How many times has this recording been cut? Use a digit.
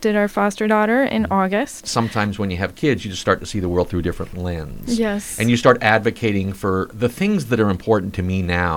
3